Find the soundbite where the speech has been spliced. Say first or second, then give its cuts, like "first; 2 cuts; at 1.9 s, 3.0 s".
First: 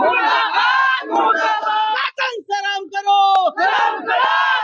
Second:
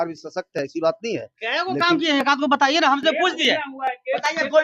first; 1 cut; at 2.1 s